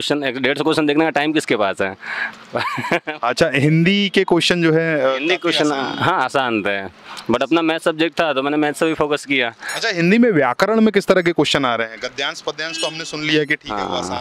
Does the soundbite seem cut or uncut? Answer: uncut